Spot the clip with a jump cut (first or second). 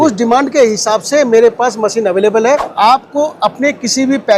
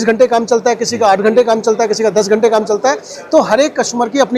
first